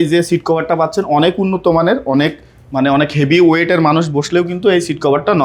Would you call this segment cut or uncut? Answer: uncut